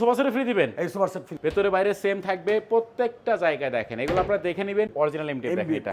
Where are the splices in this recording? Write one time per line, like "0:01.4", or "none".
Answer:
0:01.3
0:04.9